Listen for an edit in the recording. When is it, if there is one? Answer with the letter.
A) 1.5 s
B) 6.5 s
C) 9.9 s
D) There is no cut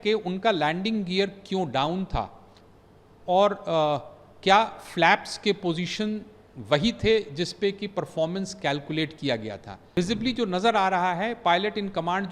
C